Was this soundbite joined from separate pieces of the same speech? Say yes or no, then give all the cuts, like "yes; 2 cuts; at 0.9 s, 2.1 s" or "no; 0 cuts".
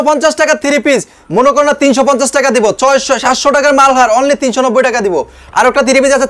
no; 0 cuts